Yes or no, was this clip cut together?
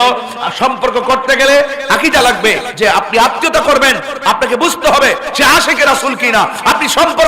yes